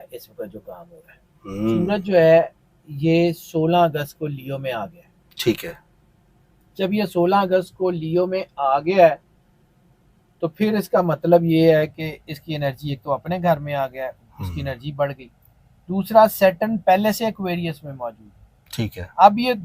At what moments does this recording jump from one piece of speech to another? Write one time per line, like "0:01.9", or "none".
0:01.8